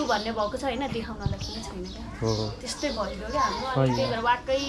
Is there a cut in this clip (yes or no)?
no